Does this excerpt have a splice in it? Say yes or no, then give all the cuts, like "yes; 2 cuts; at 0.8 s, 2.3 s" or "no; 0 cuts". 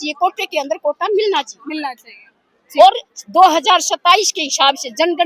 no; 0 cuts